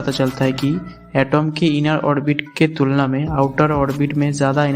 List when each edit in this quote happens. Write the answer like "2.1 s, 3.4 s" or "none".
none